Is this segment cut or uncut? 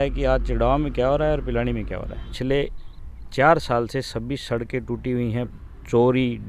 cut